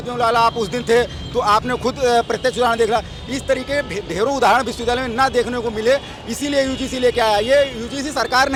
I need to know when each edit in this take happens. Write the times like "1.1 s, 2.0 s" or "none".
none